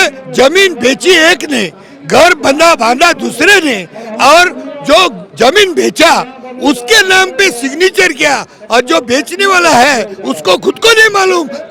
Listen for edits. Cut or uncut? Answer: uncut